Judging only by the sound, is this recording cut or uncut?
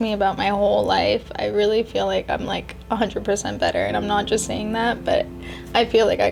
uncut